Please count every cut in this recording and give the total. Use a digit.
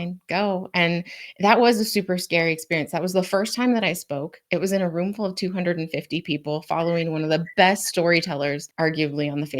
1